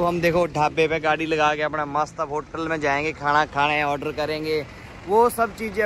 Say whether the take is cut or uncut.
uncut